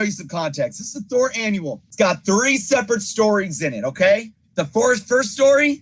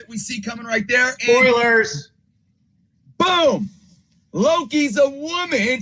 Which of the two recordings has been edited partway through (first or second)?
first